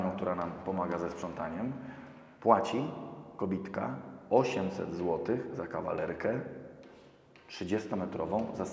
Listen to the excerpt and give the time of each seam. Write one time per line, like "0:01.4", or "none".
none